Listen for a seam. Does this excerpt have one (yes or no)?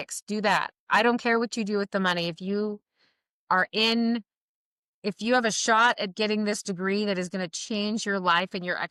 no